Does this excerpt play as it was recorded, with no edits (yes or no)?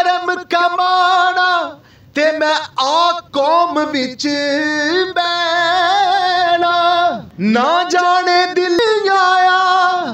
no